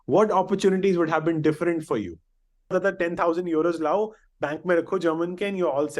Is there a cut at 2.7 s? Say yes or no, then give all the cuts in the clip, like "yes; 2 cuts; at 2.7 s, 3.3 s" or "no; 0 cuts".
yes; 1 cut; at 2.7 s